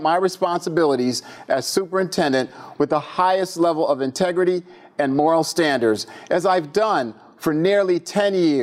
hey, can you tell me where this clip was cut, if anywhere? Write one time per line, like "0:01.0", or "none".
none